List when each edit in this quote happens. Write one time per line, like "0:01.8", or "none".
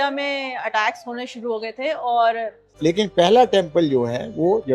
0:02.6